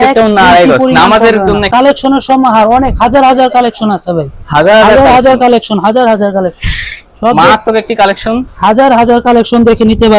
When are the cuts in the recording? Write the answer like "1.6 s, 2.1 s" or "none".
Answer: 1.7 s